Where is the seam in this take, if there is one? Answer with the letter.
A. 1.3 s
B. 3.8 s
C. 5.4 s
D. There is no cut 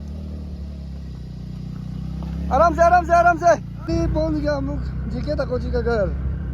B